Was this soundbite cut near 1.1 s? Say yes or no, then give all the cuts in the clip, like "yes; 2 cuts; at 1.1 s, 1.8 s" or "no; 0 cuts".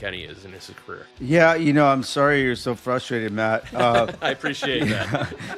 yes; 1 cut; at 1.1 s